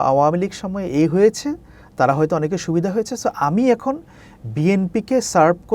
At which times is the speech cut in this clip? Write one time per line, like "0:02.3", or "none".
none

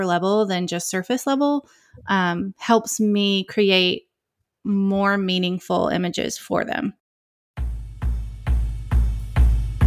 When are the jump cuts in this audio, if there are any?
0:07.1

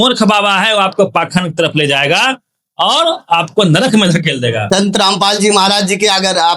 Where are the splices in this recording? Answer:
0:04.6

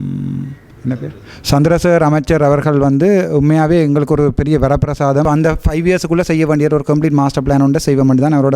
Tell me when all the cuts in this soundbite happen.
0:05.2

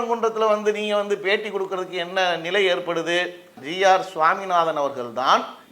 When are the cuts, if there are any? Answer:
0:03.6

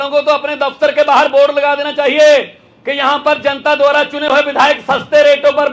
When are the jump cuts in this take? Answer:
none

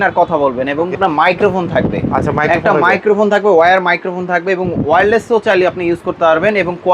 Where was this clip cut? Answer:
0:01.0

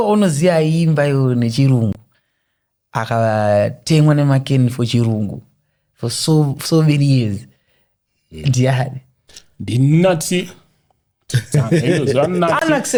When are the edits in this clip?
none

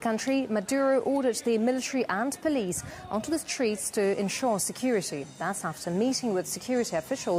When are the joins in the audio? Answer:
none

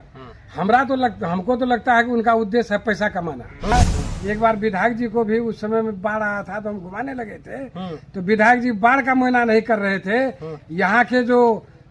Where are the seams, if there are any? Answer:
0:03.7

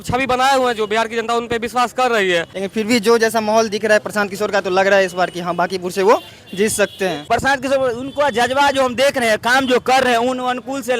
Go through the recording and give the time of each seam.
0:02.5
0:07.3

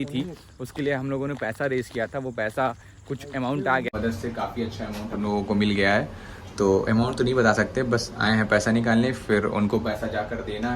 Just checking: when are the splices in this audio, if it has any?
0:03.9

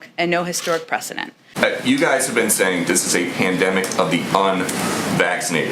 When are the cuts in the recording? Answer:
0:01.5

